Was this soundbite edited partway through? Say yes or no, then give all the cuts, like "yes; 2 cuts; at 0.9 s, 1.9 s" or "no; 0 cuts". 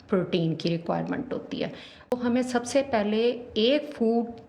yes; 1 cut; at 2.1 s